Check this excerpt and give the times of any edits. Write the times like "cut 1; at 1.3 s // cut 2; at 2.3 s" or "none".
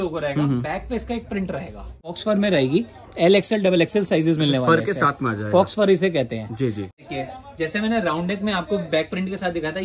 cut 1; at 2.1 s // cut 2; at 7.0 s